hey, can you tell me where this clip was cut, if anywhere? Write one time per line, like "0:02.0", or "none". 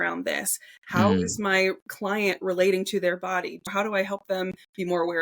0:03.7